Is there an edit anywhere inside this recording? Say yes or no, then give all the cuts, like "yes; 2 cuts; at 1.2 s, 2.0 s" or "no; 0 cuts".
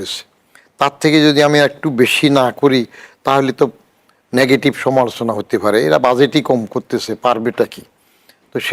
no; 0 cuts